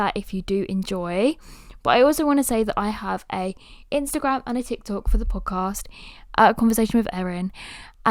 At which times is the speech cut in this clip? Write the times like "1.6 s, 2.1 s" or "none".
none